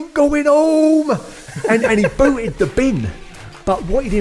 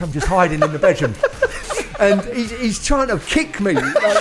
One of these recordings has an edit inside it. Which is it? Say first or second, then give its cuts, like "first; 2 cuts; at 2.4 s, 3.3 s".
second; 1 cut; at 1.6 s